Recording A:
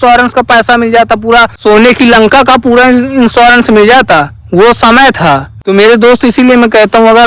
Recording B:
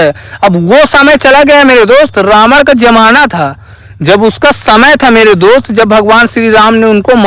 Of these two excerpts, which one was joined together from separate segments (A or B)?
A